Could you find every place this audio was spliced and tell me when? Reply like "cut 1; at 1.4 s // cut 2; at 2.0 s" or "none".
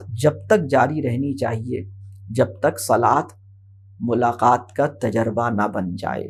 none